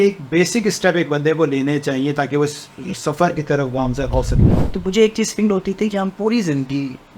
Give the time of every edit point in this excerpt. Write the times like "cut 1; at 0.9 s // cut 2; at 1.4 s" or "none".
cut 1; at 4.4 s